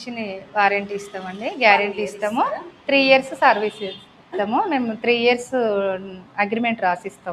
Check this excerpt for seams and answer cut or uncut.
cut